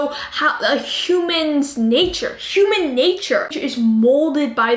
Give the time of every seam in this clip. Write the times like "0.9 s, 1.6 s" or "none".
3.5 s